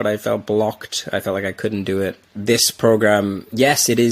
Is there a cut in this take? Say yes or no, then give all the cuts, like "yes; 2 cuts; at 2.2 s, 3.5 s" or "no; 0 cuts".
yes; 1 cut; at 2.4 s